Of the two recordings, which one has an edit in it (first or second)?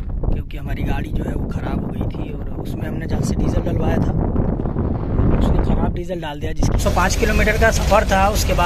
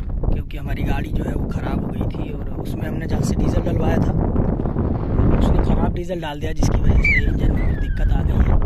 first